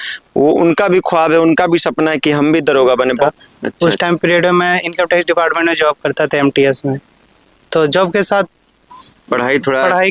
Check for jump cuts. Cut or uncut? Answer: cut